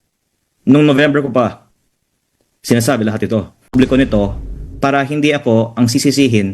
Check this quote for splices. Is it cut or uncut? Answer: cut